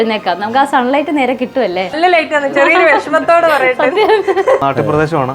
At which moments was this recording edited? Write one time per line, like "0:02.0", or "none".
0:01.9
0:04.6